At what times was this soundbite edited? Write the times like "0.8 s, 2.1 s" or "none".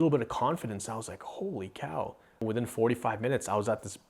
2.4 s